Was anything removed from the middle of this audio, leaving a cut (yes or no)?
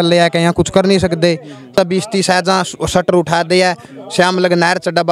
yes